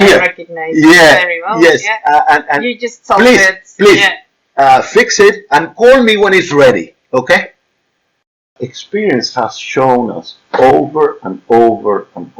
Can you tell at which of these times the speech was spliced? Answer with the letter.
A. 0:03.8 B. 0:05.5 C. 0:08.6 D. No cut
C